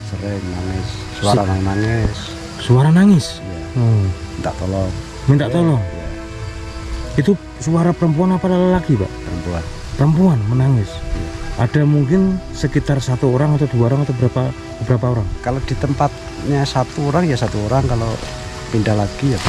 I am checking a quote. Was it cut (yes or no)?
no